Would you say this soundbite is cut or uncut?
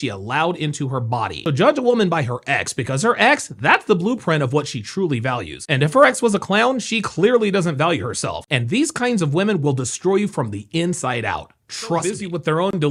uncut